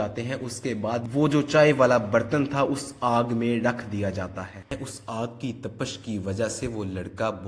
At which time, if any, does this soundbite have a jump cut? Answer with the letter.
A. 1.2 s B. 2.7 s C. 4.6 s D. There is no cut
C